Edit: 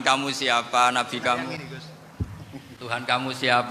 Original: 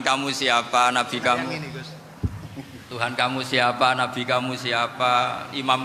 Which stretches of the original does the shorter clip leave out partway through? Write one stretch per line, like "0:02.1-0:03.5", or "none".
0:02.2-0:02.3